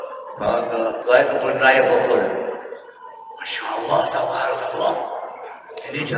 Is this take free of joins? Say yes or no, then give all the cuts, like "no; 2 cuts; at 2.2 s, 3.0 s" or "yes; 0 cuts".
no; 1 cut; at 1.0 s